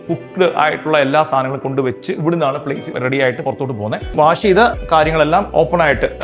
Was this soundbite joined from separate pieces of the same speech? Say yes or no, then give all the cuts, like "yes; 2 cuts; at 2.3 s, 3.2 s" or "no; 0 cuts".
yes; 2 cuts; at 2.9 s, 4.1 s